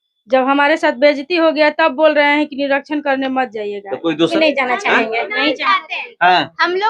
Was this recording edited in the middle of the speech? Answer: yes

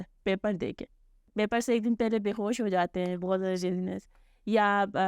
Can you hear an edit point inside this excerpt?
yes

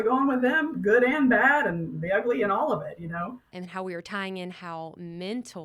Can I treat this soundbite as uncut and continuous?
no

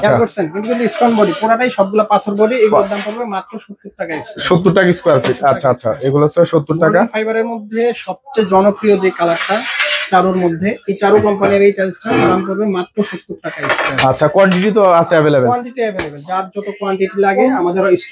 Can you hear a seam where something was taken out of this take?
no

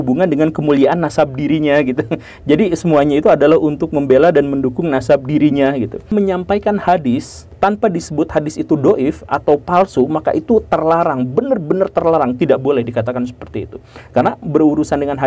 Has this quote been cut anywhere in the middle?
yes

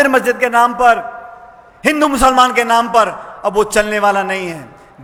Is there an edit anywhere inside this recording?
no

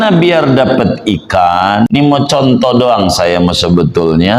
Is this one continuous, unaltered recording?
no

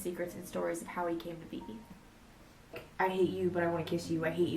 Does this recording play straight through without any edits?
no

